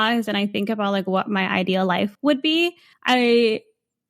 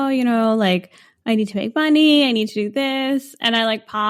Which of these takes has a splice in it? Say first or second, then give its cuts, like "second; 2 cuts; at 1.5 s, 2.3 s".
first; 2 cuts; at 2.1 s, 2.9 s